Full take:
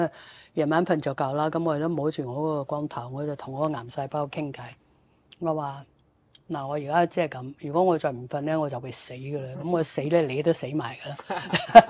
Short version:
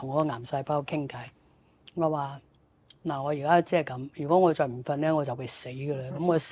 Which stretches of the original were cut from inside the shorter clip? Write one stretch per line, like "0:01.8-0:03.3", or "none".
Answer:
none